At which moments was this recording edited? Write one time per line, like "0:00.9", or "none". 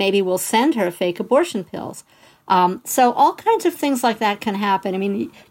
none